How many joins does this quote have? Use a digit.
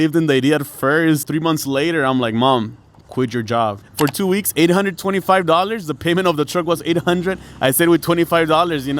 2